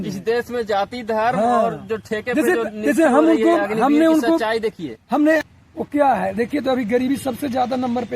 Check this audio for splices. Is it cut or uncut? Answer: cut